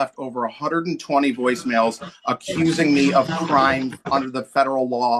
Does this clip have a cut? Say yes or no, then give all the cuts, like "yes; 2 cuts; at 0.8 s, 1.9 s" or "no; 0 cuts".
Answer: no; 0 cuts